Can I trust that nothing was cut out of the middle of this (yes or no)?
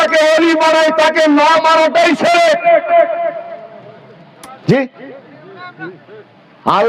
yes